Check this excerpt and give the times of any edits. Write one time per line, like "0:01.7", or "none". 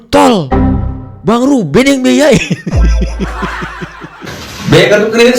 0:04.3